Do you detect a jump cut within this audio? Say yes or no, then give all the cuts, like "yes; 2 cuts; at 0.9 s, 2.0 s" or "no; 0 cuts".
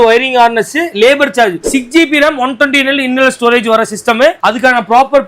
yes; 1 cut; at 1.7 s